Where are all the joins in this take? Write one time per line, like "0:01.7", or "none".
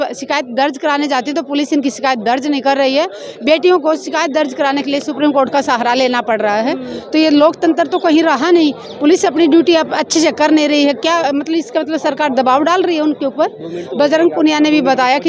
none